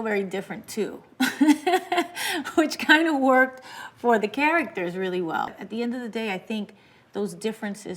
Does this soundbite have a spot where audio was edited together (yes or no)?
yes